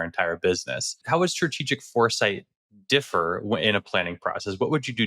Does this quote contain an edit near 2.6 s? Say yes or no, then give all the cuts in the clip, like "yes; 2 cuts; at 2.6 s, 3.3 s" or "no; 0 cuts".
no; 1 cut; at 1.0 s